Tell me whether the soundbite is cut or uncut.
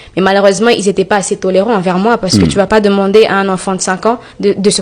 uncut